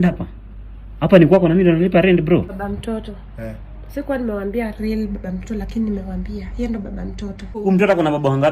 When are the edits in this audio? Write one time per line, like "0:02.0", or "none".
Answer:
0:02.5
0:07.5